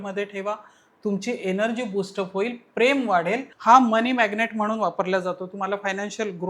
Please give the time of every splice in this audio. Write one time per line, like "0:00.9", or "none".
0:03.5